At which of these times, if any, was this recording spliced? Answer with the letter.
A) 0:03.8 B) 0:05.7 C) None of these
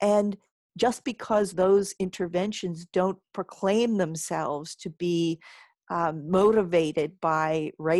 C